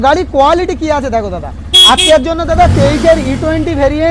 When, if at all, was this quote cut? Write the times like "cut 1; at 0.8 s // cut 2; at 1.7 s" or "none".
none